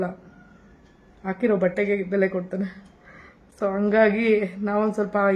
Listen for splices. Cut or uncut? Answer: uncut